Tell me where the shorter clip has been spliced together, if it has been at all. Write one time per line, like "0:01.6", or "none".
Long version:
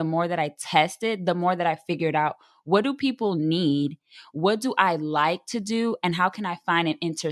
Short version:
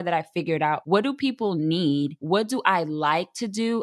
0:00.8
0:02.2